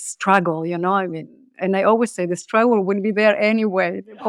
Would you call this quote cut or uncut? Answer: uncut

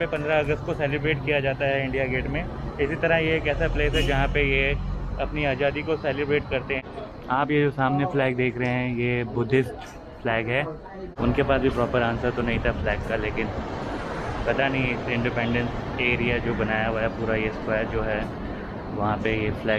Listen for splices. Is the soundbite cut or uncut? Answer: cut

